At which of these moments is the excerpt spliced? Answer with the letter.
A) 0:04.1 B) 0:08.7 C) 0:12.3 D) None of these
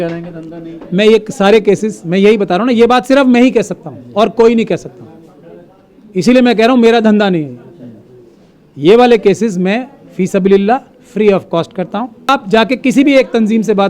C